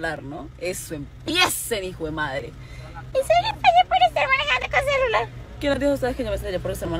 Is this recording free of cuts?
yes; 0 cuts

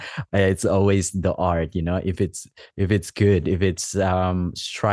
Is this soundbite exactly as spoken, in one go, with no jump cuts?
yes; 0 cuts

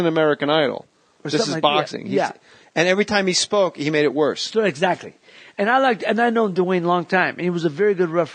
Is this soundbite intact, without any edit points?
no; 1 cut; at 4.4 s

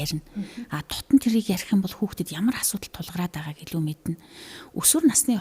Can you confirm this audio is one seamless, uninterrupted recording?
yes; 0 cuts

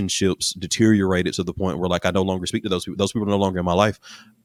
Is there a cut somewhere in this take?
no; 0 cuts

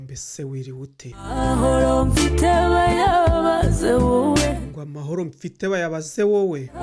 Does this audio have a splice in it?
yes; 1 cut; at 1.1 s

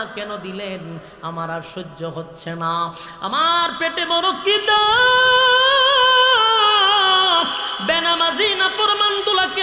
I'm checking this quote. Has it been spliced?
no; 0 cuts

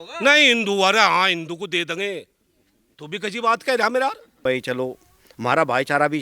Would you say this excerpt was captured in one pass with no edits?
no; 1 cut; at 4.4 s

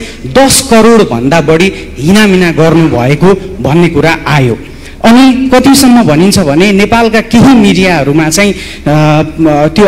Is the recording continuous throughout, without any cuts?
yes; 0 cuts

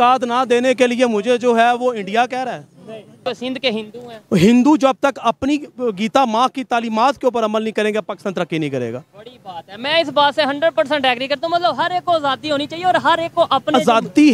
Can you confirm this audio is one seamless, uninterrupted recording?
no; 1 cut; at 3.2 s

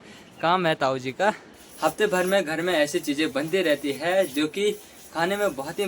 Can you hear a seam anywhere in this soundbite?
yes; 1 cut; at 1.6 s

